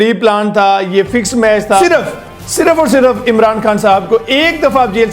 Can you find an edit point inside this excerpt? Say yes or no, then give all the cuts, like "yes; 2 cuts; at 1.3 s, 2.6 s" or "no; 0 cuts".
yes; 1 cut; at 1.8 s